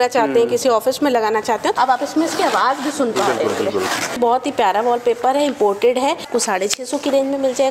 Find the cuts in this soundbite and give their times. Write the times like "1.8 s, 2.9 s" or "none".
1.7 s, 4.2 s, 6.3 s

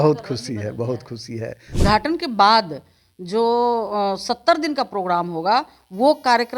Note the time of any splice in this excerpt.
1.8 s

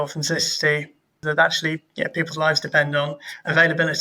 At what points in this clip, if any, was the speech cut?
1.1 s

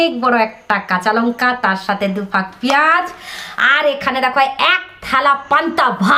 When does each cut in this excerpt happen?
none

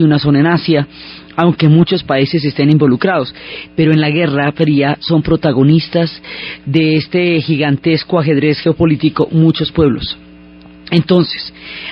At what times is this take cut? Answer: 1.1 s

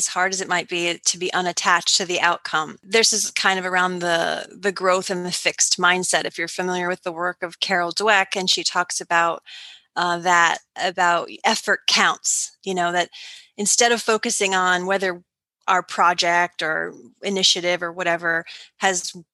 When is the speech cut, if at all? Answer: 2.8 s

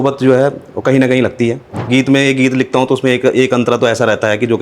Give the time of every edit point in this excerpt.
1.8 s

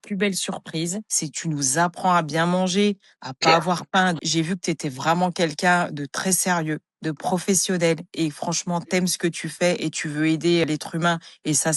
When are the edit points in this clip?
1.1 s, 4.2 s

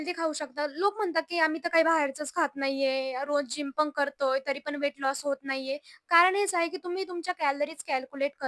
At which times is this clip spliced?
none

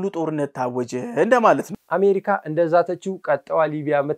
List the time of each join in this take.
1.8 s

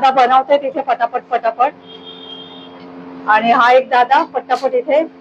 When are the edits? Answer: none

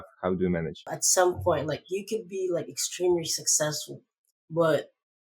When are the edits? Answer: 1.0 s

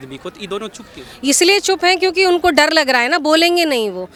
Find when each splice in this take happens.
none

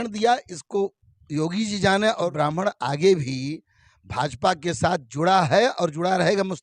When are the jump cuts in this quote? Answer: 2.3 s

